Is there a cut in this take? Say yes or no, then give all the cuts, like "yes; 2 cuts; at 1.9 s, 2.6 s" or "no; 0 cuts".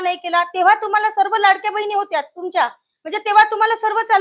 no; 0 cuts